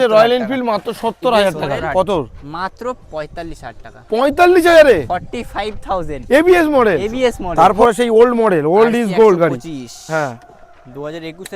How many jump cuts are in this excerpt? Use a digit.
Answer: 2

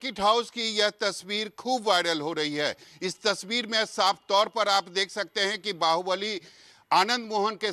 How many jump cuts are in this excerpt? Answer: 0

